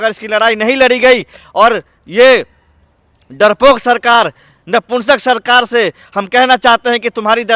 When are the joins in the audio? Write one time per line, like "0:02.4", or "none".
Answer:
none